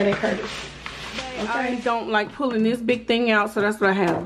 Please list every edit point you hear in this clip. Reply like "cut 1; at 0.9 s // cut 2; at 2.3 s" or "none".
cut 1; at 1.7 s